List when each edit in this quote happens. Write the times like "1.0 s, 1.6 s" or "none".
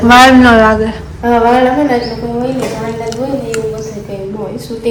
none